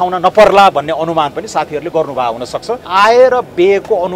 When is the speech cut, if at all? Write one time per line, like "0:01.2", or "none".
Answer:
0:02.8